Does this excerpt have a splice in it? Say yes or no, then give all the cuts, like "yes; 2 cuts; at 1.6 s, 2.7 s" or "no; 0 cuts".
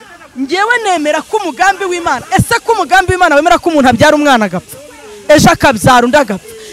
no; 0 cuts